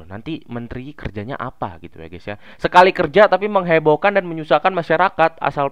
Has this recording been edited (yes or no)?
no